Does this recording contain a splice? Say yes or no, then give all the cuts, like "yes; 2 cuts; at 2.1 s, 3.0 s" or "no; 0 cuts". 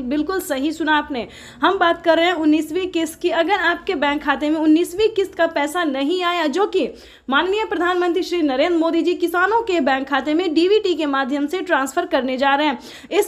no; 0 cuts